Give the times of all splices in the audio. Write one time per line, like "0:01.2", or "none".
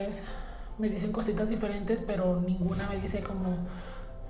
none